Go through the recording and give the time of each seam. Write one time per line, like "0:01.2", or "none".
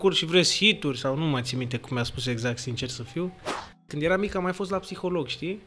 0:03.9